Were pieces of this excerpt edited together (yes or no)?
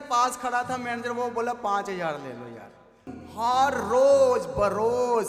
yes